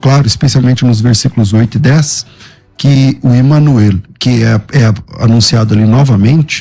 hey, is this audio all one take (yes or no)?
yes